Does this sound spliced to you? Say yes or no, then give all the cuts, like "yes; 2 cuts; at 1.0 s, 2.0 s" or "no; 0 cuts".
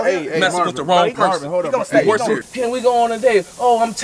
yes; 1 cut; at 2.5 s